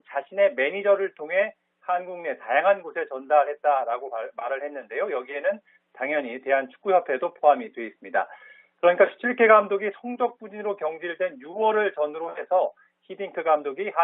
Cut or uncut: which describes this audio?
uncut